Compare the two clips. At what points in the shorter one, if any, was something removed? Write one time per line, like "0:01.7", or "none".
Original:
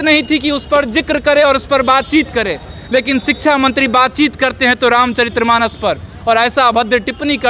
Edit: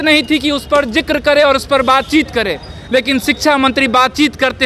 none